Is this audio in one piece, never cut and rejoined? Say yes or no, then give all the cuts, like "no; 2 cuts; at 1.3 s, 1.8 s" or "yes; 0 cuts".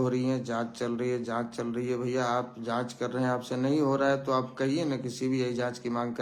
yes; 0 cuts